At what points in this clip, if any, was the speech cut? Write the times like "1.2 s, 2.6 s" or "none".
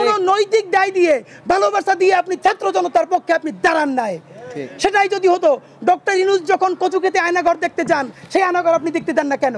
none